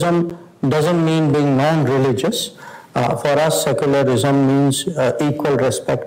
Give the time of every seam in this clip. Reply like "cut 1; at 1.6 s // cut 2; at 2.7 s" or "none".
none